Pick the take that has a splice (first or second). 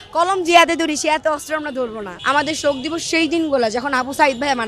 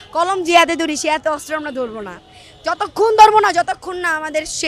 first